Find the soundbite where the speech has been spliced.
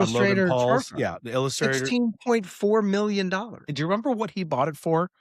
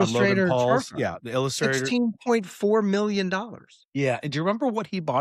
first; 1 cut; at 3.7 s

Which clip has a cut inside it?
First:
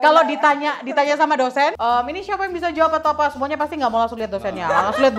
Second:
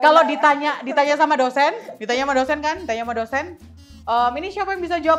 first; 1 cut; at 1.8 s

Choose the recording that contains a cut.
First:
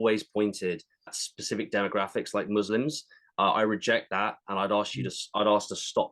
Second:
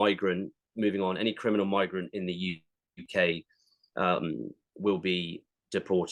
first; 1 cut; at 1.2 s

